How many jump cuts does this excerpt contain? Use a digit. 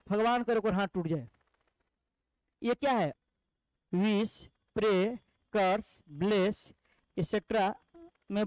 1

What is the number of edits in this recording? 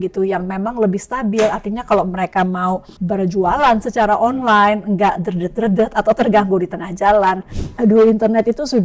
2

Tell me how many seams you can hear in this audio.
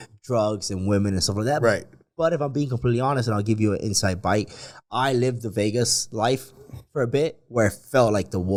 0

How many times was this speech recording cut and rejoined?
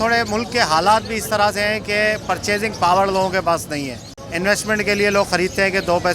1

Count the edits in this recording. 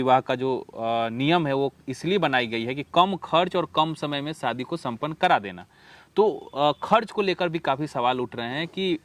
0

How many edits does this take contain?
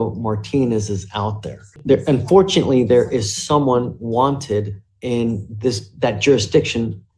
1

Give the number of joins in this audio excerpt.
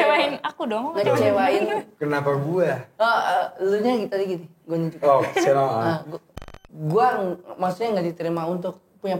1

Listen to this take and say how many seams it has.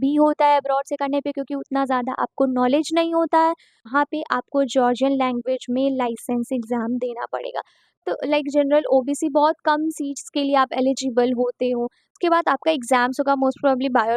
3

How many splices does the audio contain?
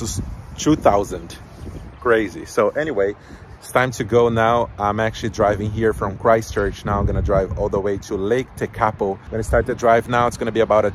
0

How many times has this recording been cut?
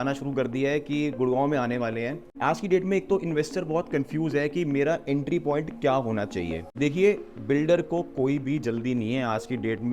2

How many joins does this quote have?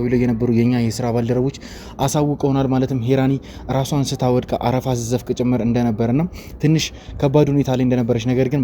0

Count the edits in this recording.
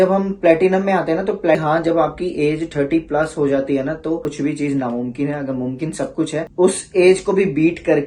3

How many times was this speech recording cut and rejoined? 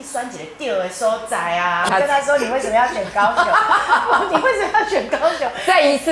1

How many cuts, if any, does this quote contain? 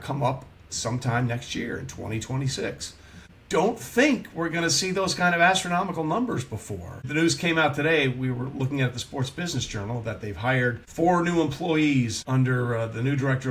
4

